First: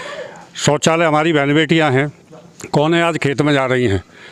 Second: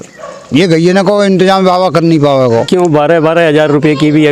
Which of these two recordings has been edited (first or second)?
second